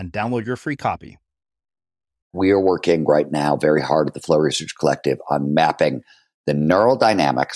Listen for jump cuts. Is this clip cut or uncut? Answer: cut